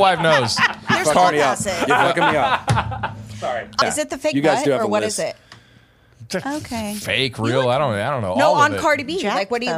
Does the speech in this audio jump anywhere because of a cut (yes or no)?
yes